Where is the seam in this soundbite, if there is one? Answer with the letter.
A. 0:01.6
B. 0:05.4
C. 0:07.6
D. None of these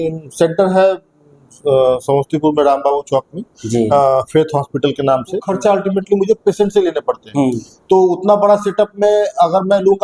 B